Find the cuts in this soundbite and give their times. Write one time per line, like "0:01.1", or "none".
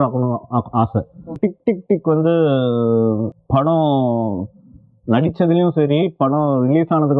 0:01.4
0:03.3